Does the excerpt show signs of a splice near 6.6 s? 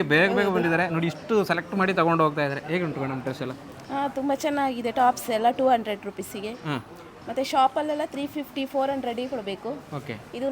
no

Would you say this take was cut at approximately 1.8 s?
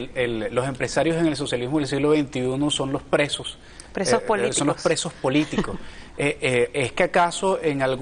no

